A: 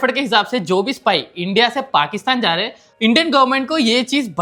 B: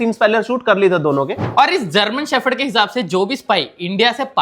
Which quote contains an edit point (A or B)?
B